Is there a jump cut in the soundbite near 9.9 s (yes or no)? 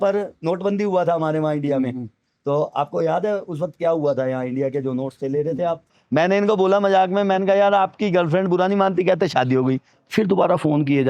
yes